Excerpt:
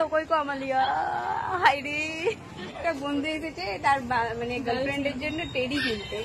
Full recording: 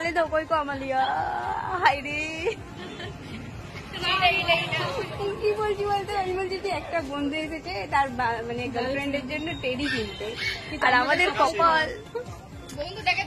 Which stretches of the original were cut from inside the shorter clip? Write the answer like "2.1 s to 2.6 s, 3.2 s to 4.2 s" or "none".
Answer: 3.0 s to 6.8 s